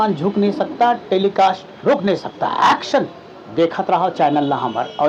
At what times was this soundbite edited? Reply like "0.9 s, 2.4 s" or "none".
none